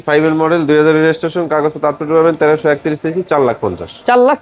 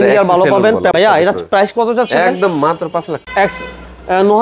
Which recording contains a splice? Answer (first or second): second